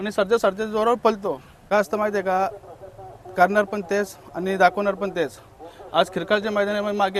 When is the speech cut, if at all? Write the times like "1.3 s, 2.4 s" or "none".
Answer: 1.5 s